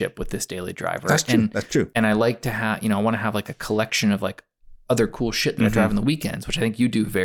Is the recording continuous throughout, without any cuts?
yes; 0 cuts

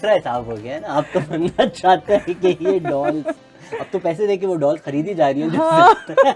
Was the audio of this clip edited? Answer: no; 0 cuts

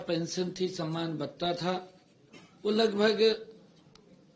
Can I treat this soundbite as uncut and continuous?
yes; 0 cuts

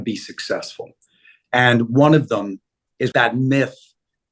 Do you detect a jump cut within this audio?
yes; 1 cut; at 3.1 s

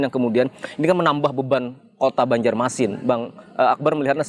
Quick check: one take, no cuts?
yes; 0 cuts

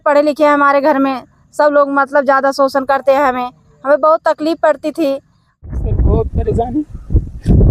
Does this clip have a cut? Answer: yes; 1 cut; at 5.6 s

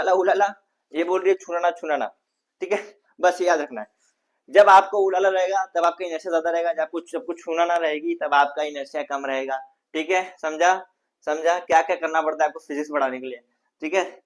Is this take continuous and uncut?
yes; 0 cuts

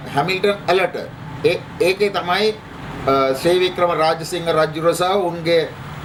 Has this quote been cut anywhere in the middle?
no; 0 cuts

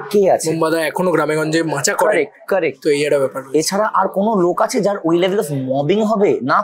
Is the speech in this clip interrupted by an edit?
no; 0 cuts

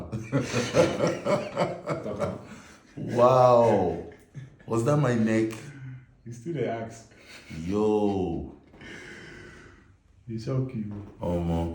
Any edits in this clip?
no; 0 cuts

